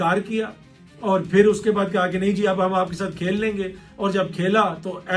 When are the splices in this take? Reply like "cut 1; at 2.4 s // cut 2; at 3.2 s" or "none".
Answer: none